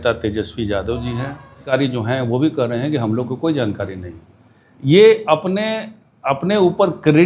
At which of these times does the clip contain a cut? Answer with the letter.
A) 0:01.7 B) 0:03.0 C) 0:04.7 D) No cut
A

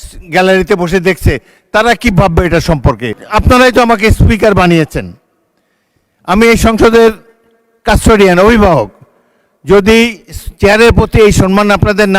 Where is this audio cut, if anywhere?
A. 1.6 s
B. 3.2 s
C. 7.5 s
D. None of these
B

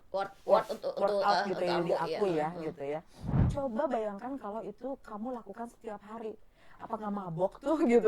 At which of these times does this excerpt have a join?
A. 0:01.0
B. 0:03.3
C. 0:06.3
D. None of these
B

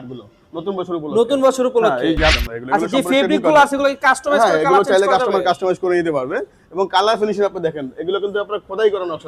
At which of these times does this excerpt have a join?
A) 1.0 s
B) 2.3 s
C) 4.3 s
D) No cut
B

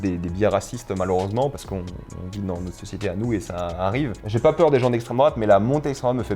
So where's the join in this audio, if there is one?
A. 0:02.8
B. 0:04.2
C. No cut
B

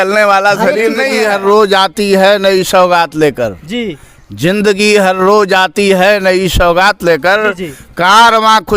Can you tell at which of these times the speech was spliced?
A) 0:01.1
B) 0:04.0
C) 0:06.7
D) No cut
A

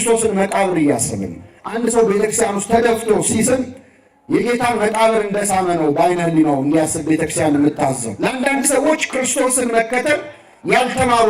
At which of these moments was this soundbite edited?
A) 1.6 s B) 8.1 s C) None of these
B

